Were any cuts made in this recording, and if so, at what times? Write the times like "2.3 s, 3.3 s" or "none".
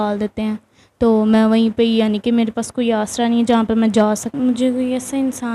4.3 s